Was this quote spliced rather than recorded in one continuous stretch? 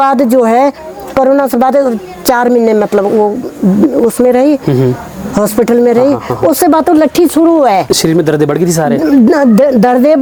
no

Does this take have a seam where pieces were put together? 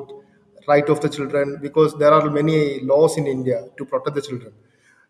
no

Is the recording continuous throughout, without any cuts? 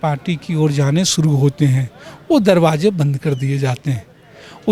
yes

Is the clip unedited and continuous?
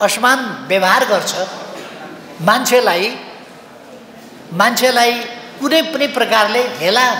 yes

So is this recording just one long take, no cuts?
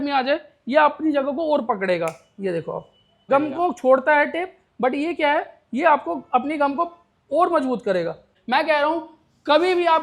no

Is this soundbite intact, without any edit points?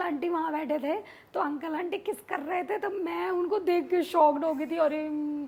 yes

